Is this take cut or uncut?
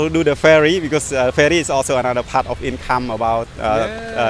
uncut